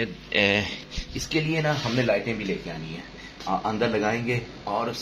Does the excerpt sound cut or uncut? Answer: uncut